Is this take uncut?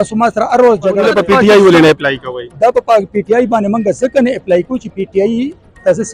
no; 1 cut; at 1.0 s

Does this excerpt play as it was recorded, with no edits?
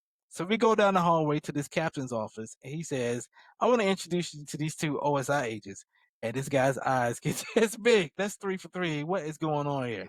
no; 1 cut; at 8.2 s

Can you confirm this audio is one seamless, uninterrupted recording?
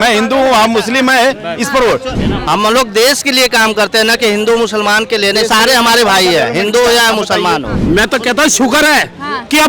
no; 2 cuts; at 2.1 s, 7.7 s

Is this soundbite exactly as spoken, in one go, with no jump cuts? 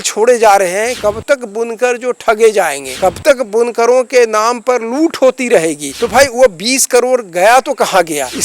no; 2 cuts; at 1.0 s, 5.9 s

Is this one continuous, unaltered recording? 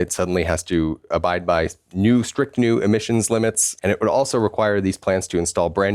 no; 1 cut; at 3.7 s

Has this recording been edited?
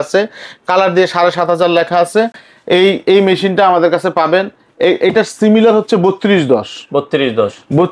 no; 0 cuts

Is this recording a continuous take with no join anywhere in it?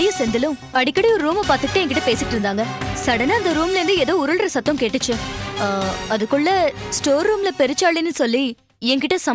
yes; 0 cuts

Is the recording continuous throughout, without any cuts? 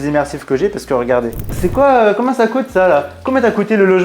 no; 1 cut; at 1.5 s

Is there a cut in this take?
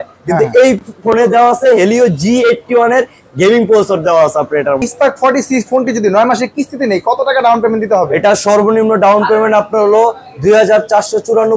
yes; 1 cut; at 4.8 s

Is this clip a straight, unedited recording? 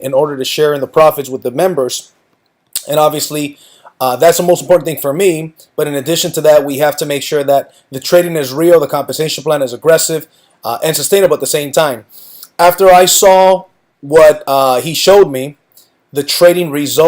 no; 1 cut; at 2.3 s

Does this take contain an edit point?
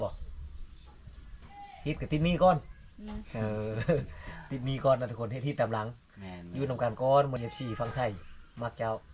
yes; 1 cut; at 7.4 s

